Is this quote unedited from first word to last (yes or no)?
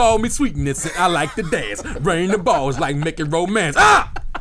yes